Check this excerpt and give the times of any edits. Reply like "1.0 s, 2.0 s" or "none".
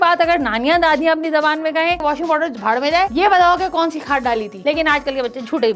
2.0 s, 4.5 s